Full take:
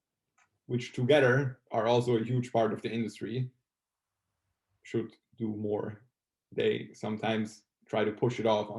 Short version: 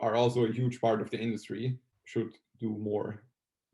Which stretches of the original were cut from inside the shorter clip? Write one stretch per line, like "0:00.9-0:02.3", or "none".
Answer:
0:03.6-0:04.7